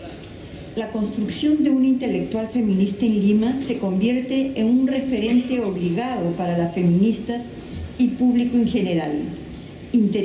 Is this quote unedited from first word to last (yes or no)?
yes